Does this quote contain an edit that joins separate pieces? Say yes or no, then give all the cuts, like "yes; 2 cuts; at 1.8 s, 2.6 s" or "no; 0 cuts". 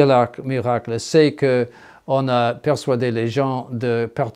no; 0 cuts